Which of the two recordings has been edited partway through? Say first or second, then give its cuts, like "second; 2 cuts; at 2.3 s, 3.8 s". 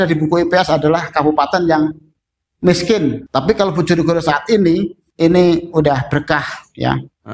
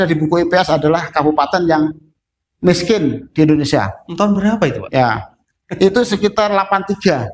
first; 2 cuts; at 3.2 s, 5.0 s